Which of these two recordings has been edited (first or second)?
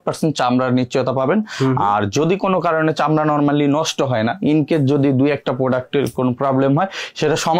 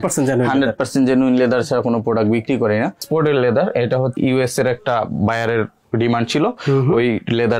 second